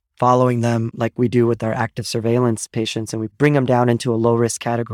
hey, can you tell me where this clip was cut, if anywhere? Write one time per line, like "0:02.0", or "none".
0:00.9